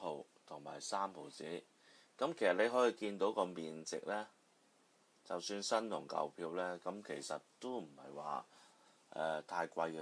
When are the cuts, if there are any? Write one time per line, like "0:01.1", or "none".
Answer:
0:07.2